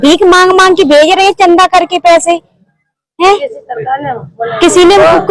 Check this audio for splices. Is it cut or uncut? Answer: uncut